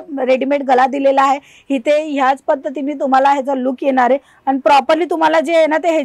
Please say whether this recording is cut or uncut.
uncut